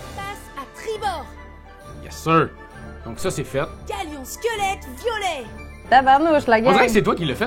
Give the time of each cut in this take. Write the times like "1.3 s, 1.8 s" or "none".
5.7 s